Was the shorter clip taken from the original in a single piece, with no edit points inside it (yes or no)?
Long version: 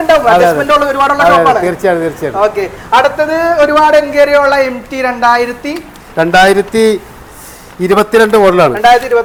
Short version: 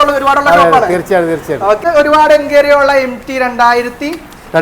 no